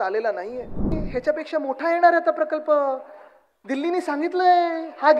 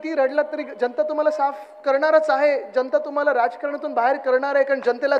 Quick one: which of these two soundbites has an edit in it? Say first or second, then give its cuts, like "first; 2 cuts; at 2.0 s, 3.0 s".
first; 1 cut; at 1.0 s